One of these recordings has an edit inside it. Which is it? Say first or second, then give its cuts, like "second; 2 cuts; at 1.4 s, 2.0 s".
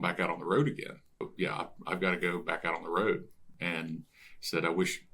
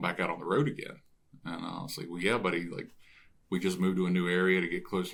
first; 2 cuts; at 1.3 s, 3.4 s